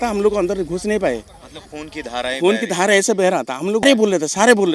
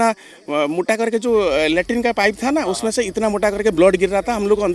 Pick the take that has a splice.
first; 1 cut; at 3.8 s

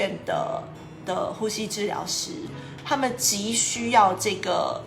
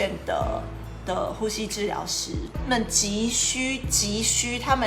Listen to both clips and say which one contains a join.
first; 1 cut; at 2.6 s

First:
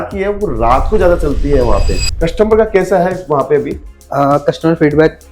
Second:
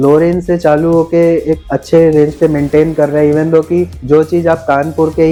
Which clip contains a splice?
first; 1 cut; at 2.0 s

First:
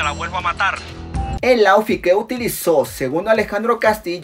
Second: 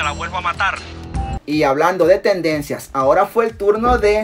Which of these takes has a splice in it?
second; 1 cut; at 1.4 s

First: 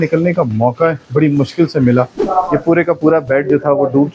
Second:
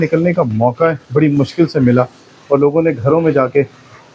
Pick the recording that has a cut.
first; 1 cut; at 2.2 s

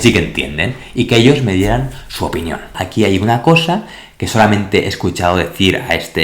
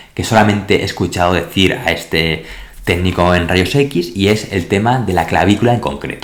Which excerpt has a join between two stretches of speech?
first; 1 cut; at 2.8 s

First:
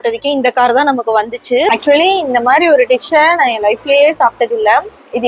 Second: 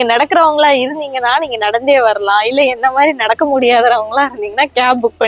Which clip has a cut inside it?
first; 1 cut; at 1.7 s

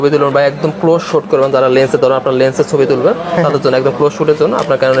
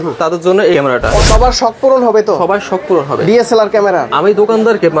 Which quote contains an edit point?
second; 1 cut; at 1.2 s

